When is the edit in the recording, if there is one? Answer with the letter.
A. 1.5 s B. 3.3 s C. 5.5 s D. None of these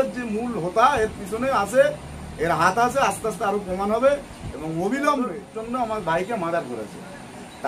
C